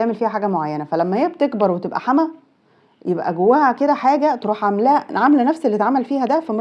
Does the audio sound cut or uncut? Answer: uncut